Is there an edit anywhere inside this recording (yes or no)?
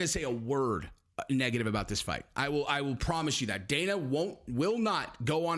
no